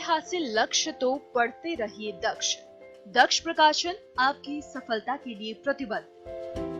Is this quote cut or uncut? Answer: uncut